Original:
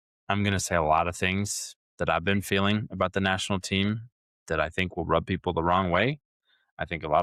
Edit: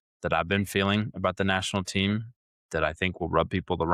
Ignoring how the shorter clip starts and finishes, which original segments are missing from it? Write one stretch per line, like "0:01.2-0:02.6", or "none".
none